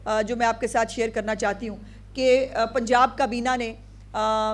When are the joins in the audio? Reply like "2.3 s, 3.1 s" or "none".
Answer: none